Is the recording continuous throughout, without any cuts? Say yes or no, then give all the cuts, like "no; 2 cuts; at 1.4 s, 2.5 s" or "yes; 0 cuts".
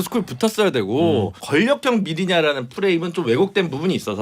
no; 1 cut; at 1.4 s